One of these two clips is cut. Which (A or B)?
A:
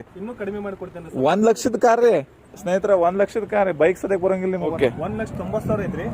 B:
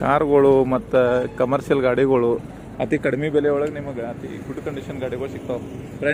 A